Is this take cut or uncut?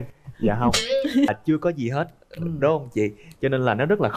cut